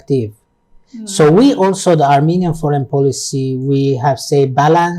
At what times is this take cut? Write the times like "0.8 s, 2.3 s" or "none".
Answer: none